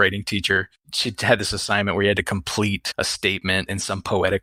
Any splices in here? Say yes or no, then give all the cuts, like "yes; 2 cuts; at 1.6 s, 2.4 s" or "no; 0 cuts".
no; 0 cuts